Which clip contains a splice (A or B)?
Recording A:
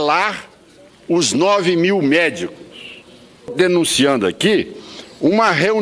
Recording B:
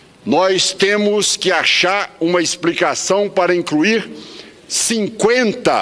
A